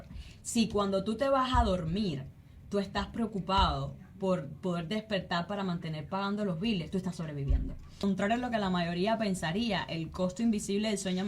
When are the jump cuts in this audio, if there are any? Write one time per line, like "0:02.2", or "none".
0:08.0